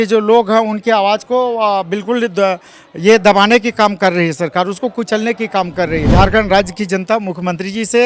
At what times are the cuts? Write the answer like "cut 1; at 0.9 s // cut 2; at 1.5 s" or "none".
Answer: cut 1; at 6.1 s